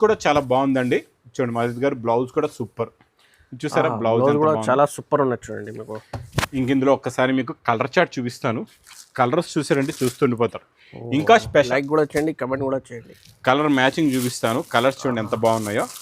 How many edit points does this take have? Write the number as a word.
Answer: one